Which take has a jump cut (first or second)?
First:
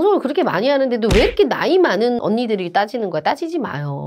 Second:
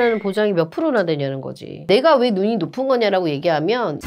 second